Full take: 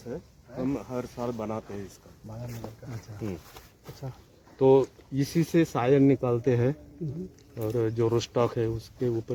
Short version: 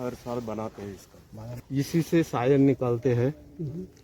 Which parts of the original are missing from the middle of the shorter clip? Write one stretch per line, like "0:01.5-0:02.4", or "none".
0:02.5-0:05.0